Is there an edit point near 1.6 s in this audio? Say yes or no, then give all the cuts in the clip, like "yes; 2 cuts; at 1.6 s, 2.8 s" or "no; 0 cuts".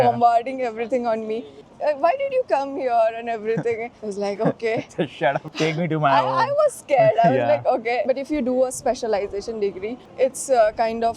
yes; 2 cuts; at 1.6 s, 8.0 s